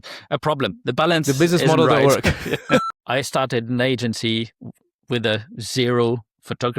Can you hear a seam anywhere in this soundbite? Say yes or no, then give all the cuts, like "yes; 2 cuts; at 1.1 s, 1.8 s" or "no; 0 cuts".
yes; 1 cut; at 2.9 s